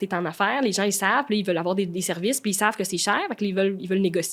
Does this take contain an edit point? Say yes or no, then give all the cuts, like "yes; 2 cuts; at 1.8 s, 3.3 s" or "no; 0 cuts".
no; 0 cuts